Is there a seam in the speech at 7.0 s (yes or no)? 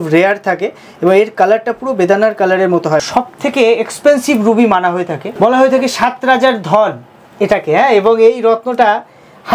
no